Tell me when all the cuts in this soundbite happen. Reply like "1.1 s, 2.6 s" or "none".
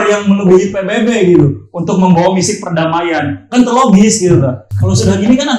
4.7 s

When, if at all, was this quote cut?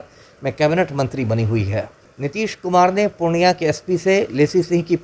2.1 s

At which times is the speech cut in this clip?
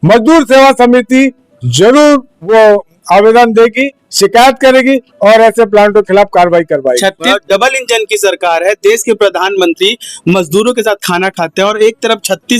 2.5 s, 7.3 s

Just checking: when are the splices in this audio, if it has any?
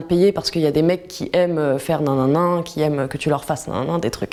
none

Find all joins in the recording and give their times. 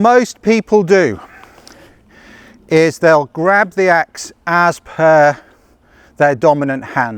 none

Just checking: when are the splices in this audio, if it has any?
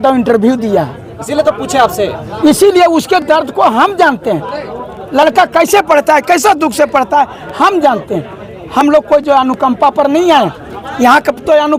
none

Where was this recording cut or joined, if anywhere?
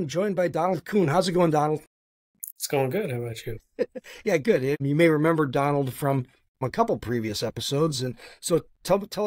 4.8 s, 6.6 s

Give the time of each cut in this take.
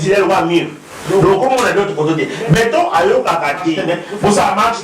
3.8 s

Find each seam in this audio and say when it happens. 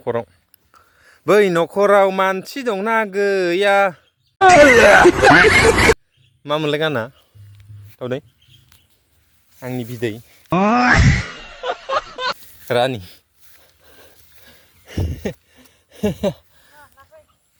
none

